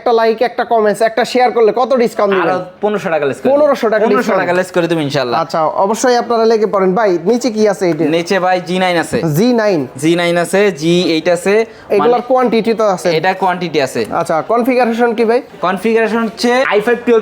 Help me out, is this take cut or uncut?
uncut